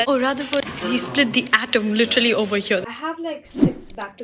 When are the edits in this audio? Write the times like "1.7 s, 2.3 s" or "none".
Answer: 2.9 s